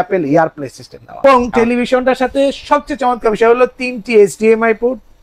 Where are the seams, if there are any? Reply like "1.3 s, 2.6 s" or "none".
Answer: 1.2 s